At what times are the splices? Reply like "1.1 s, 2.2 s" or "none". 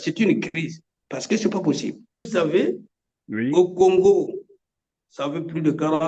2.3 s

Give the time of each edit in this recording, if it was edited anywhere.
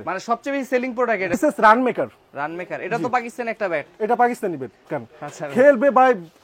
1.3 s, 4.9 s

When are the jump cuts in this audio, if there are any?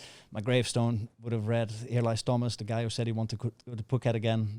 none

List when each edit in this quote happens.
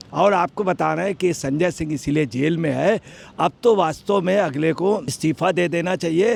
none

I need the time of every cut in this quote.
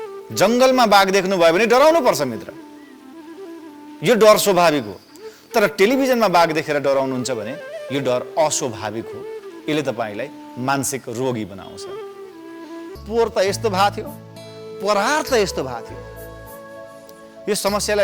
13.0 s

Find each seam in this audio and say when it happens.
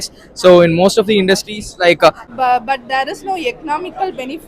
2.2 s

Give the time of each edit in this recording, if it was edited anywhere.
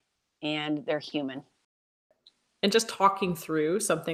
1.9 s

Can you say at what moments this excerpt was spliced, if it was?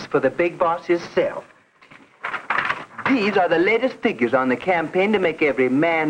none

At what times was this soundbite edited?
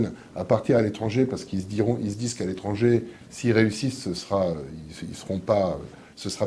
none

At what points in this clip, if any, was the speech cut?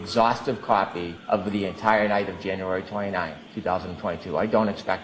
1.1 s, 3.4 s

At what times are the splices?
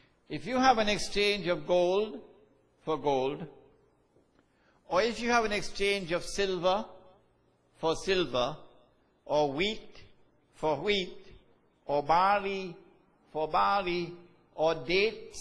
none

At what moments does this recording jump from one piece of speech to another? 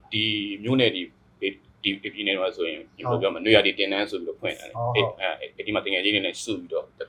none

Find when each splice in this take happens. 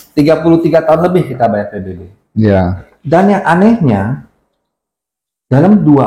2.9 s

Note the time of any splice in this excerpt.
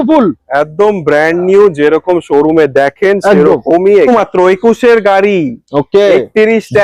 4.1 s

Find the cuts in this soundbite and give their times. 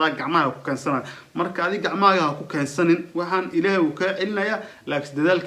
none

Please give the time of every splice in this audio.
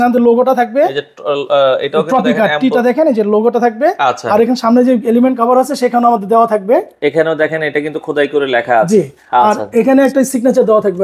none

